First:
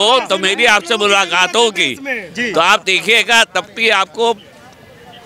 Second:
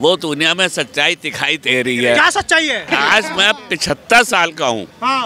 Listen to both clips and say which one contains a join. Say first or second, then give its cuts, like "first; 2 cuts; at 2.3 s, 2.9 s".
second; 1 cut; at 2.8 s